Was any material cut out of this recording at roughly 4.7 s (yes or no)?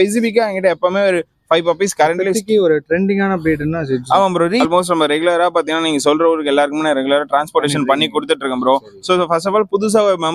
yes